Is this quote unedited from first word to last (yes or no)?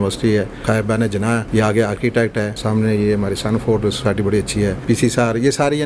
no